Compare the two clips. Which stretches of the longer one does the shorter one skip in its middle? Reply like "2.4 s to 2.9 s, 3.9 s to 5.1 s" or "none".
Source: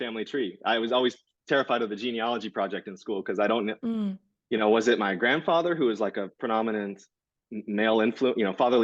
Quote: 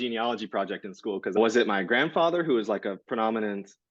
3.4 s to 4.7 s